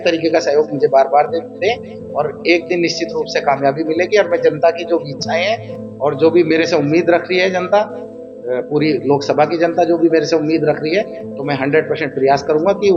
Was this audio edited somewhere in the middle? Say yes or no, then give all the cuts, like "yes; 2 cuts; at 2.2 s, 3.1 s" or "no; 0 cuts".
no; 0 cuts